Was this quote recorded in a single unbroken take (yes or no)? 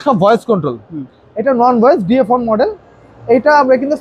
yes